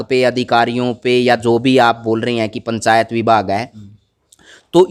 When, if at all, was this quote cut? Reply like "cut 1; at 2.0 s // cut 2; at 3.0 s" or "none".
none